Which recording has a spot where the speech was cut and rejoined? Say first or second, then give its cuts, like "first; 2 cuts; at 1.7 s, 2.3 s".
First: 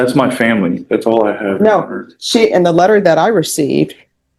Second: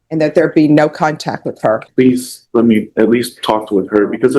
second; 1 cut; at 1.9 s